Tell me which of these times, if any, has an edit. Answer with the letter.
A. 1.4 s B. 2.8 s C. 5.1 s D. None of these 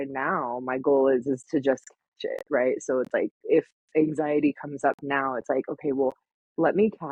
D